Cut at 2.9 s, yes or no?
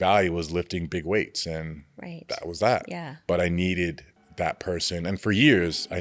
yes